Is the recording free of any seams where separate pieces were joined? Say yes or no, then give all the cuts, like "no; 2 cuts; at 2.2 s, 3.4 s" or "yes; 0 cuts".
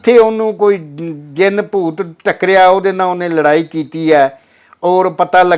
yes; 0 cuts